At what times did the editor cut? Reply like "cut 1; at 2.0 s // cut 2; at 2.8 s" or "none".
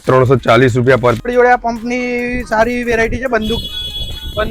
cut 1; at 1.2 s